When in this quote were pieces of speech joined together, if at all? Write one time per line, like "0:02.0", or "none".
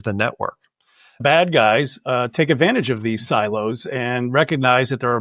0:01.2